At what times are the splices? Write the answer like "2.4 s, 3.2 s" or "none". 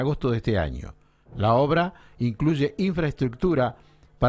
2.7 s